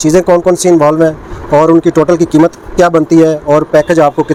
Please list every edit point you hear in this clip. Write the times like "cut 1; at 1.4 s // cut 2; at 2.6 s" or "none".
none